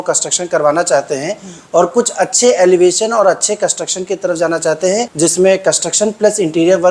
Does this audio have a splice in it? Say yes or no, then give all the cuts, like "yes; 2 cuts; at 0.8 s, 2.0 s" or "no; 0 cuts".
yes; 1 cut; at 5.1 s